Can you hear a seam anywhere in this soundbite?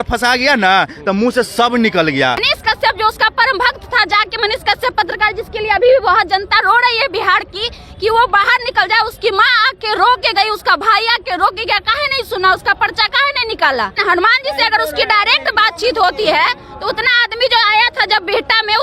yes; 2 cuts; at 2.5 s, 14.0 s

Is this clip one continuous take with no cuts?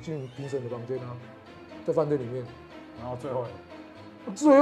yes; 0 cuts

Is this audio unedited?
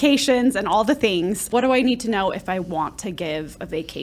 no; 1 cut; at 1.5 s

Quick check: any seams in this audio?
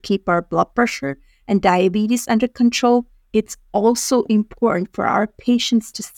no; 0 cuts

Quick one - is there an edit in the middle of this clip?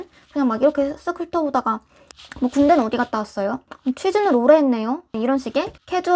no; 0 cuts

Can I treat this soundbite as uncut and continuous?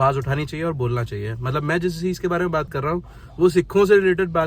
yes; 0 cuts

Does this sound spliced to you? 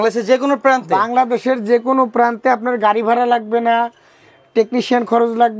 no; 0 cuts

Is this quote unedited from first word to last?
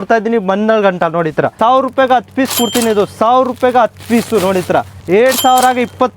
no; 2 cuts; at 1.5 s, 5.0 s

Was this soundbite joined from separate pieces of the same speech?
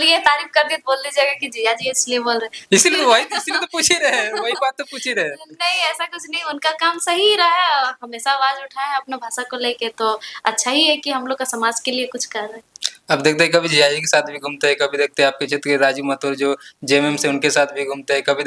no; 0 cuts

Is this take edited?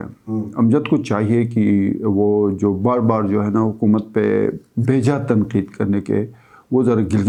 no; 0 cuts

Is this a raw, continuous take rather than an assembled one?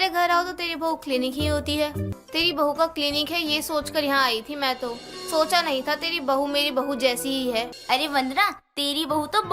no; 2 cuts; at 2.1 s, 7.8 s

